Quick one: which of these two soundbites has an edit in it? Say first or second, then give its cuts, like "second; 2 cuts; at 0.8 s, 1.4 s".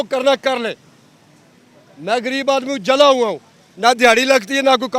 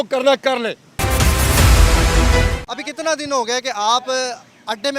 second; 2 cuts; at 1.0 s, 2.6 s